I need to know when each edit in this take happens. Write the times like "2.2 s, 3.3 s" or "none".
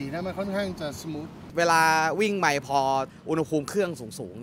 1.3 s, 3.2 s

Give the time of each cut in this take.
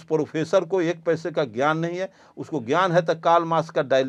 none

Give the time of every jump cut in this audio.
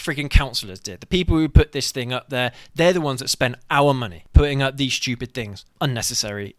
4.2 s, 5.6 s

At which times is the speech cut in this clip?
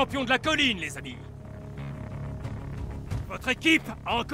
none

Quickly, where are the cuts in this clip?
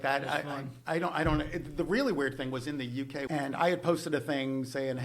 3.2 s

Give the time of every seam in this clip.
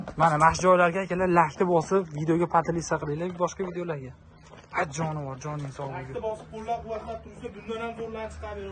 none

